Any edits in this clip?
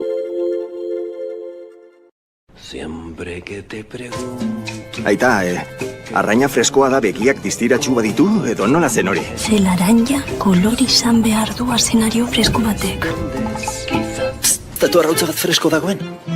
yes; 1 cut; at 14.8 s

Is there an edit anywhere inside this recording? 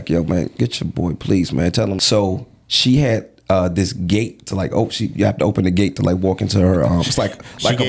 yes; 1 cut; at 2.0 s

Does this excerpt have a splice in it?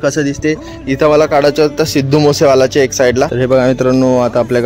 yes; 1 cut; at 3.4 s

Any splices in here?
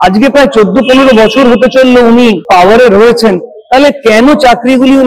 yes; 1 cut; at 2.4 s

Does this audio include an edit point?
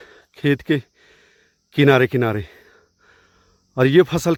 no; 0 cuts

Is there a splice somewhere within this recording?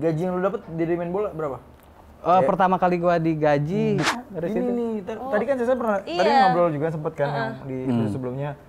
yes; 1 cut; at 4.0 s

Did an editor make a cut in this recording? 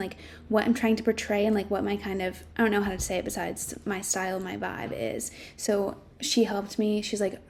no; 0 cuts

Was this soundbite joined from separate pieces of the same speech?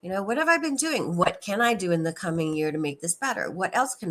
no; 0 cuts

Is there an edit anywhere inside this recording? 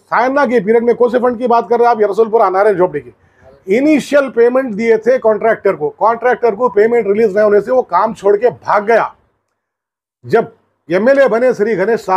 no; 0 cuts

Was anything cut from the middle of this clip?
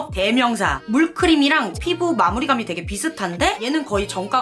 yes; 1 cut; at 1.8 s

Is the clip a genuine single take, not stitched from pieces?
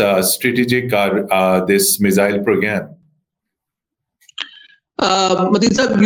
yes; 0 cuts

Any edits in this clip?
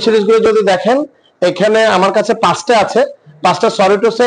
no; 0 cuts

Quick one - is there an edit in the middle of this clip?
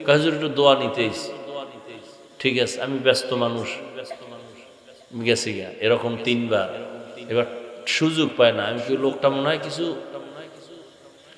no; 0 cuts

